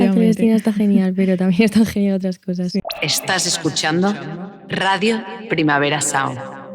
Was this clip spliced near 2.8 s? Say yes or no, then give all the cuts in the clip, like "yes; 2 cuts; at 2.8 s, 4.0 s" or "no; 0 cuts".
yes; 1 cut; at 2.8 s